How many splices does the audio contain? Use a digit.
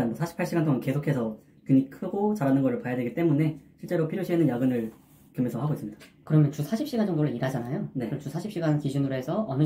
0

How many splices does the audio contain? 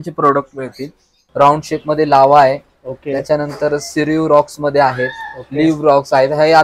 1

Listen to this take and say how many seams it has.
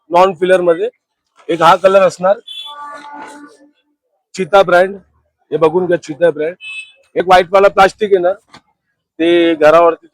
1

